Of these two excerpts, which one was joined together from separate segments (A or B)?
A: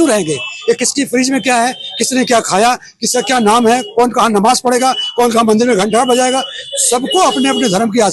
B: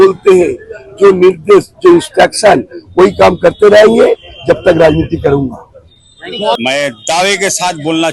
B